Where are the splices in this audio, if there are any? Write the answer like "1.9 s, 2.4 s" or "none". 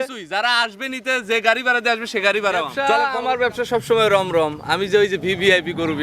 2.7 s